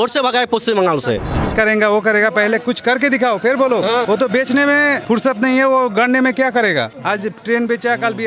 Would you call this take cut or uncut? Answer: cut